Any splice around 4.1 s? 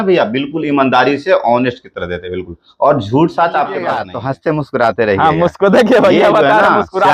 yes; 1 cut; at 4.1 s

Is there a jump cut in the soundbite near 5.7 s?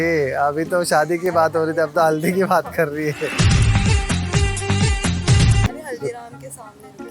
yes; 1 cut; at 5.7 s

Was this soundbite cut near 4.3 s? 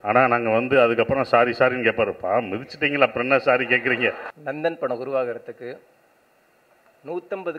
yes; 1 cut; at 4.3 s

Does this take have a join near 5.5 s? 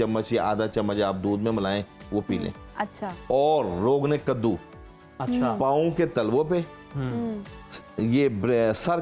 no; 0 cuts

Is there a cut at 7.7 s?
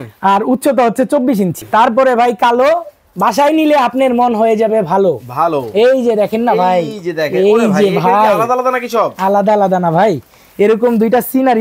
no; 1 cut; at 1.6 s

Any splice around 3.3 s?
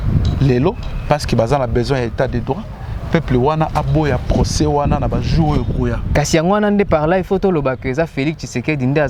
no; 1 cut; at 6.1 s

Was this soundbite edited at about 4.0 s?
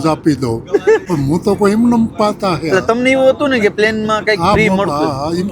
no; 1 cut; at 1.0 s

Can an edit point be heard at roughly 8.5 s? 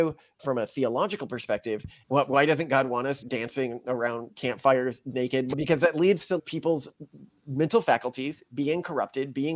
no; 4 cuts; at 1.9 s, 3.2 s, 5.5 s, 6.4 s

